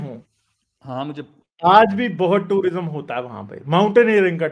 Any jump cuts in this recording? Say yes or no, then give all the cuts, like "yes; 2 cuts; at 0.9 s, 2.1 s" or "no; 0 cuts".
no; 0 cuts